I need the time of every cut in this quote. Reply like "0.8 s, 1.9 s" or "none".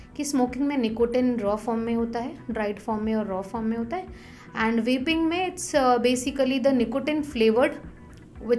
none